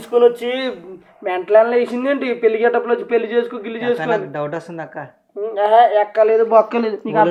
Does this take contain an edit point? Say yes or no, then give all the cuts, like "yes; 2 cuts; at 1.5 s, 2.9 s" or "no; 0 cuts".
no; 0 cuts